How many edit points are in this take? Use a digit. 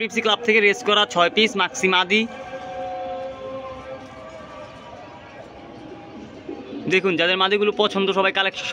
0